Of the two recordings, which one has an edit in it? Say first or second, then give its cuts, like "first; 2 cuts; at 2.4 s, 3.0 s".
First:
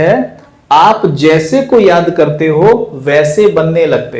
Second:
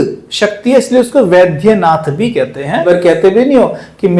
second; 1 cut; at 2.8 s